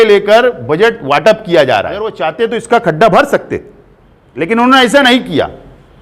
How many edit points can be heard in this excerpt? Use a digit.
1